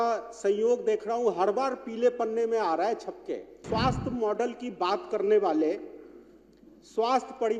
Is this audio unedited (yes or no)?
no